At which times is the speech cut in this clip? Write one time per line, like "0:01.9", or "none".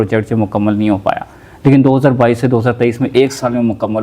none

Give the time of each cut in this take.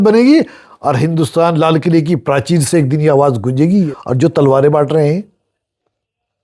0:03.9

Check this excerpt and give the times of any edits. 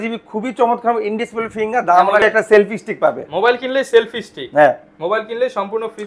0:02.2

